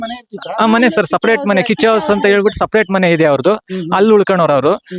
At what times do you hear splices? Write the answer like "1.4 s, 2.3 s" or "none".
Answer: none